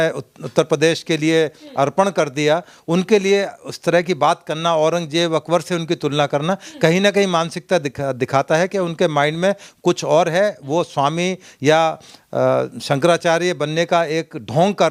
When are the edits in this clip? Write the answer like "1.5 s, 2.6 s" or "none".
none

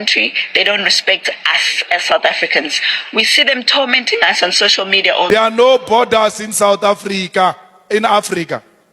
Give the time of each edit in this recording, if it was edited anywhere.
5.3 s

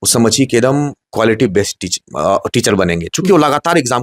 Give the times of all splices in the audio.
1.0 s

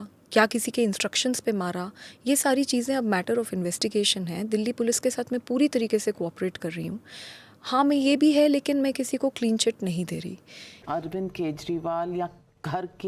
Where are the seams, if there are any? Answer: 10.8 s

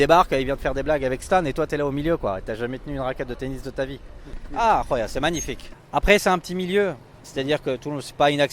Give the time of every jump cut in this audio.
none

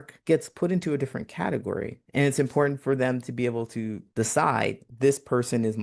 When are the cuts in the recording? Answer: 2.0 s, 4.0 s, 4.9 s

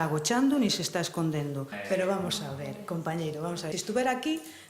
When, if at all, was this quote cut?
1.7 s, 3.7 s

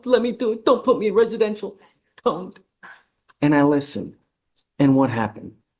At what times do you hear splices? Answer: none

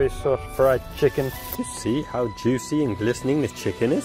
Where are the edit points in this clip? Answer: 1.4 s

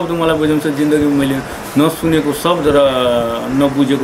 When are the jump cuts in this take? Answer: none

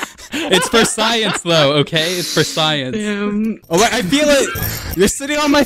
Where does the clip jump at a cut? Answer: 3.6 s

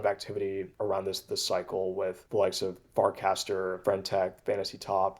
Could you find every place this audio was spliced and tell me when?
none

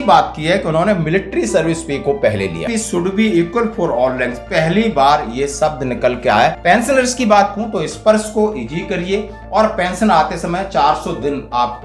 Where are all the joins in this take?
2.6 s, 6.6 s

